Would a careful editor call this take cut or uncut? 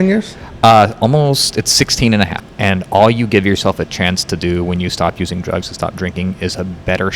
cut